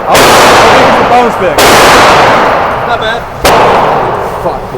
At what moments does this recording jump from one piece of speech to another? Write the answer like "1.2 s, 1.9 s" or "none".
3.5 s